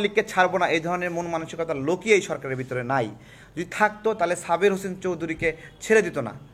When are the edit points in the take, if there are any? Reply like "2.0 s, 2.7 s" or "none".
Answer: none